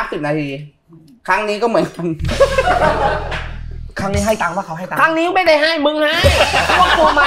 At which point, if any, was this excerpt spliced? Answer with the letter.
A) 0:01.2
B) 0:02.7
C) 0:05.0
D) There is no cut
D